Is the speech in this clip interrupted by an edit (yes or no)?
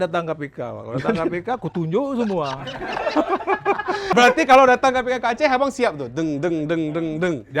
yes